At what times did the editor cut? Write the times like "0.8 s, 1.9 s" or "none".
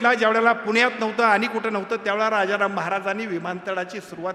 none